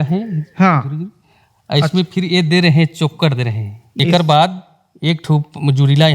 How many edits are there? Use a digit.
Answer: 1